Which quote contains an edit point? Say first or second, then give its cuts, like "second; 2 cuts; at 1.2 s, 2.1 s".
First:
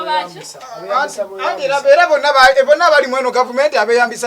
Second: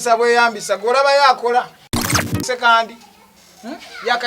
second; 1 cut; at 2.0 s